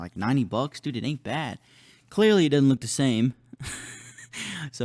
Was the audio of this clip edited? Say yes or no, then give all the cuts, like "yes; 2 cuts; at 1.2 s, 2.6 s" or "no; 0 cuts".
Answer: no; 0 cuts